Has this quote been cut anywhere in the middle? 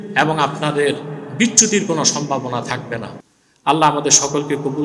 no; 0 cuts

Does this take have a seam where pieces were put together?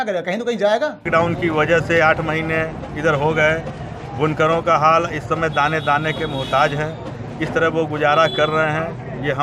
yes; 1 cut; at 1.1 s

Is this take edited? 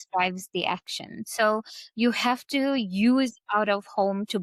no; 0 cuts

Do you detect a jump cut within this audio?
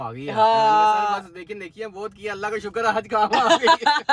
no; 0 cuts

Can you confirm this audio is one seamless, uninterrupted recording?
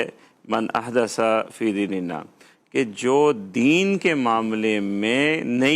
yes; 0 cuts

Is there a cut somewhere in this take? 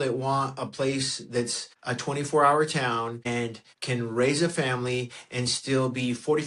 yes; 2 cuts; at 1.7 s, 3.3 s

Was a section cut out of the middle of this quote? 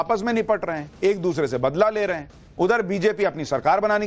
yes; 1 cut; at 1.0 s

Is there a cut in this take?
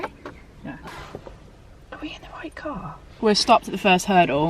yes; 2 cuts; at 0.8 s, 3.1 s

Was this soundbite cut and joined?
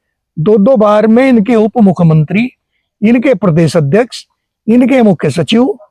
no; 0 cuts

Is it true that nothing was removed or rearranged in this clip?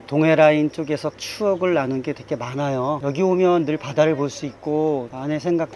no; 2 cuts; at 1.2 s, 3.0 s

